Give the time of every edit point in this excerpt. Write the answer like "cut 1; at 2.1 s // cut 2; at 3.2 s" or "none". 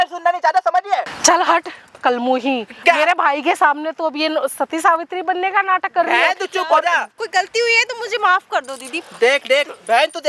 cut 1; at 1.1 s // cut 2; at 7.2 s

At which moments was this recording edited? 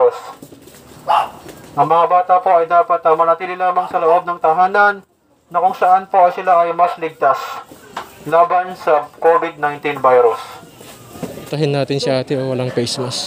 cut 1; at 11.3 s

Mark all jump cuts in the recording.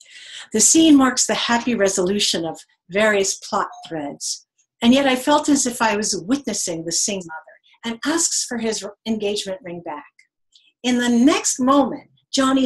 none

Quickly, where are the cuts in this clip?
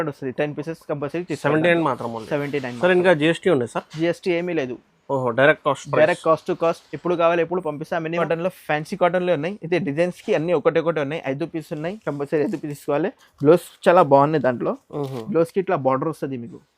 cut 1; at 8.1 s

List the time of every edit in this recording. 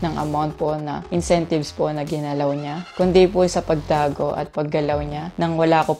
none

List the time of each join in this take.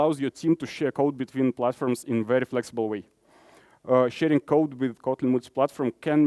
none

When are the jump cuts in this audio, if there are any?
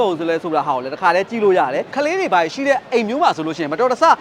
cut 1; at 1.9 s

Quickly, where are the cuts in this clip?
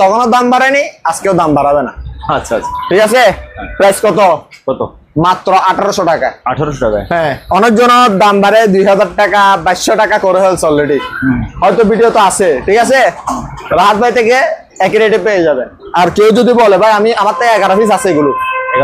none

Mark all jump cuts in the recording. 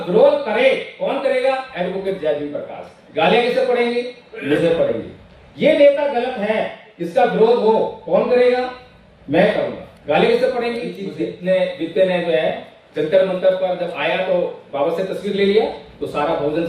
cut 1; at 11.1 s

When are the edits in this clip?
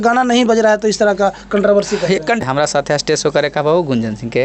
cut 1; at 2.4 s

